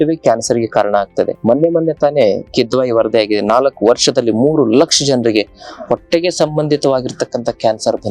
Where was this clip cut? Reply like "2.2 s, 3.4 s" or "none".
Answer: none